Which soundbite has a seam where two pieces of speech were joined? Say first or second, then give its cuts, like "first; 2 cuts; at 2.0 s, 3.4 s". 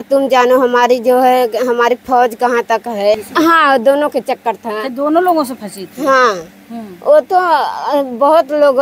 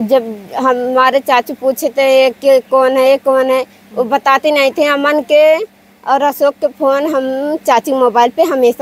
first; 1 cut; at 3.2 s